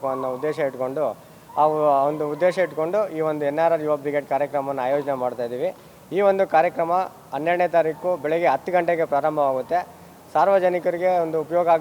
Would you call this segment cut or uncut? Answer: uncut